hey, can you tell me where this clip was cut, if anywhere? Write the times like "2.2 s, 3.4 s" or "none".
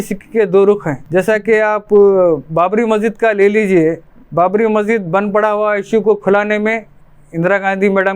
none